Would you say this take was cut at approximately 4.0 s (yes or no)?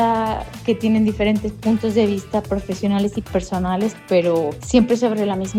no